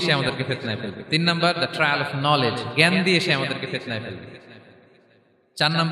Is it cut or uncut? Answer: uncut